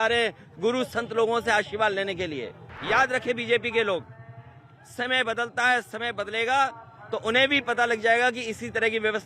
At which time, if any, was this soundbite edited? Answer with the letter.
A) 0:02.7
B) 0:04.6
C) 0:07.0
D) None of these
A